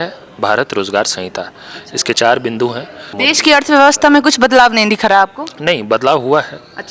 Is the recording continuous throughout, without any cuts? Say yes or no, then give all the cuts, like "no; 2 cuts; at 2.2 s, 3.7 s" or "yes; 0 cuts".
no; 1 cut; at 3.0 s